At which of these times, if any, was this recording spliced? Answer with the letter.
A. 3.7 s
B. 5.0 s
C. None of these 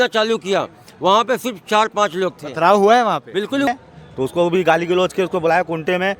A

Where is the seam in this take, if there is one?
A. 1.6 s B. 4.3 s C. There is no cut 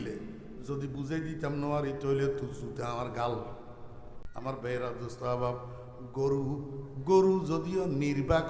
B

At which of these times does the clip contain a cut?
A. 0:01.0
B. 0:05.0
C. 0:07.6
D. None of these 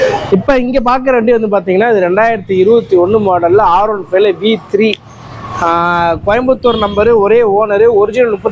D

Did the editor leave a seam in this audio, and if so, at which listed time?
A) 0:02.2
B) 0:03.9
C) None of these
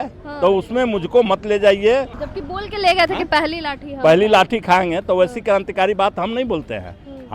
A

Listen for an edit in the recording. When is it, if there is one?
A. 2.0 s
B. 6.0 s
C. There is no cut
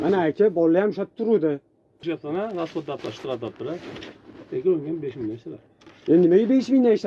A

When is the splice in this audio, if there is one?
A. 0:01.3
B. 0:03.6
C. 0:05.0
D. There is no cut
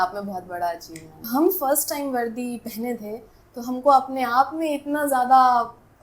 A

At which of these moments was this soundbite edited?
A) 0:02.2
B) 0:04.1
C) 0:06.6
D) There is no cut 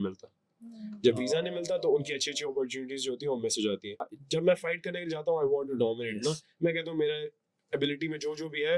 B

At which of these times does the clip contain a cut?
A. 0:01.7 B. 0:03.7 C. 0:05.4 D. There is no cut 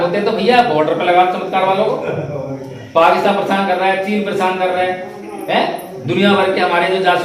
D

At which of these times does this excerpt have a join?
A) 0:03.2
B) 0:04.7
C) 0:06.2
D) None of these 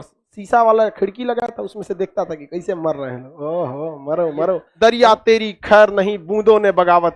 B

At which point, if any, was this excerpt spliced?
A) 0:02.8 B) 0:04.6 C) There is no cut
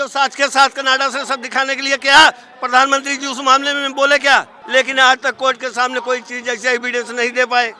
B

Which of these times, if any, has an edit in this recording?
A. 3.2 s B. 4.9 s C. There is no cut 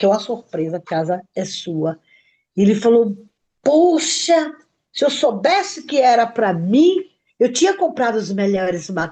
C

